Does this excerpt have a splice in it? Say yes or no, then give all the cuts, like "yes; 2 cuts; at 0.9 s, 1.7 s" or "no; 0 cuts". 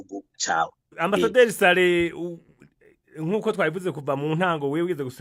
no; 0 cuts